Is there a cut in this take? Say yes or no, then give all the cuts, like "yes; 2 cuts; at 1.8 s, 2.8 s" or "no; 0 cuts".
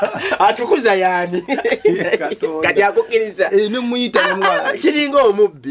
no; 0 cuts